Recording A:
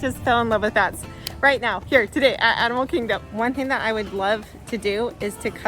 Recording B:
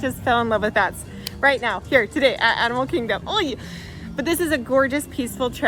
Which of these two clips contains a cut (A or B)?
A